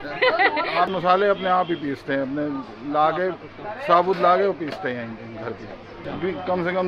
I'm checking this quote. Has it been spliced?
yes; 2 cuts; at 0.9 s, 6.0 s

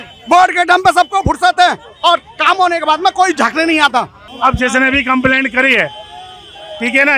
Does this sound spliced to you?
yes; 1 cut; at 4.2 s

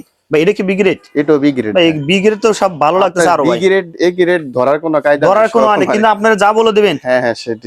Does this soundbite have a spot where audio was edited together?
no; 0 cuts

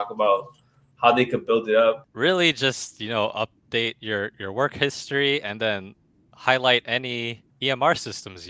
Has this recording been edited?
yes; 2 cuts; at 2.0 s, 7.4 s

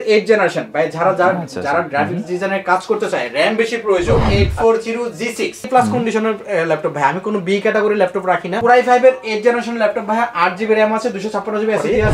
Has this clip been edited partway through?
yes; 3 cuts; at 4.2 s, 5.7 s, 8.6 s

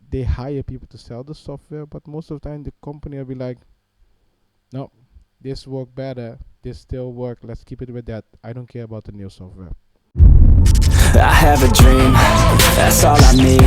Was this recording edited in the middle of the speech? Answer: yes; 1 cut; at 10.0 s

